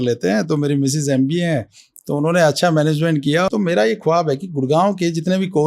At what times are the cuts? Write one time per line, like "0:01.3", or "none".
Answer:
0:03.5